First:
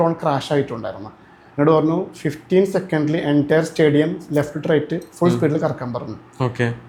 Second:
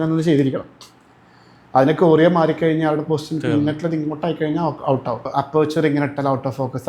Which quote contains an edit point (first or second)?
second